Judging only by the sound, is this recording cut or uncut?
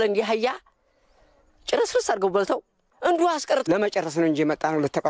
cut